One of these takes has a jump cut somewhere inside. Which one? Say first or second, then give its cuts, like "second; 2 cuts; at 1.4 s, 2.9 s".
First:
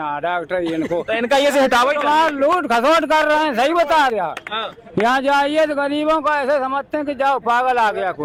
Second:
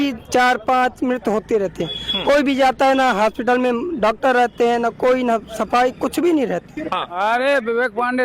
second; 1 cut; at 7.1 s